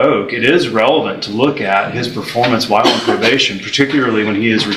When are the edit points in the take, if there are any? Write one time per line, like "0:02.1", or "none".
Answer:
none